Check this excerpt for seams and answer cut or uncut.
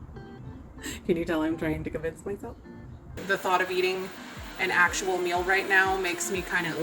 cut